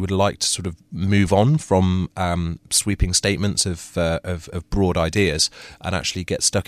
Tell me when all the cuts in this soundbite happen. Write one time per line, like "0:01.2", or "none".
none